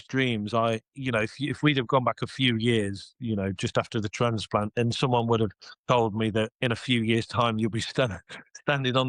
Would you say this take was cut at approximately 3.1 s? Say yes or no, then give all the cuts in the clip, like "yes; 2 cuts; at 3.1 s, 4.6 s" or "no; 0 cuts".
no; 1 cut; at 5.7 s